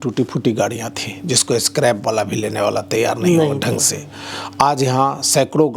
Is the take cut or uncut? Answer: uncut